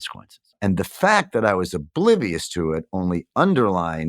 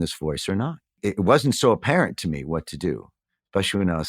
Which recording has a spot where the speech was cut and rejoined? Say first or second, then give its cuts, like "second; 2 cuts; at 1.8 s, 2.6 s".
second; 1 cut; at 1.0 s